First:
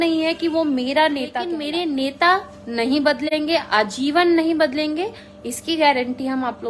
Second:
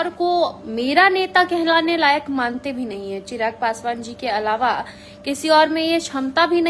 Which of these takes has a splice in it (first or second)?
first